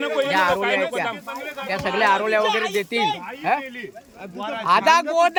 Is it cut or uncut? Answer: uncut